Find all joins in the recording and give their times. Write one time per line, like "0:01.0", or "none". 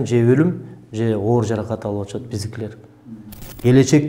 0:02.9